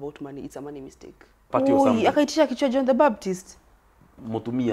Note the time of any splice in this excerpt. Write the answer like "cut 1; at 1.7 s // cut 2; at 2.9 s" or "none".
cut 1; at 1.5 s